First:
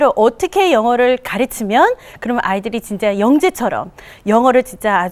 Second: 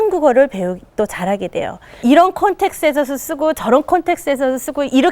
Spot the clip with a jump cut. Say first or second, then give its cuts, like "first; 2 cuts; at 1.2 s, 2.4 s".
second; 1 cut; at 1.9 s